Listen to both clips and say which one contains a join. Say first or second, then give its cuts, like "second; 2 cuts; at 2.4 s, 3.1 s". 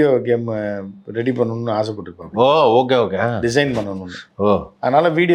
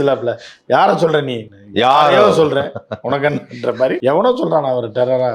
second; 1 cut; at 4.0 s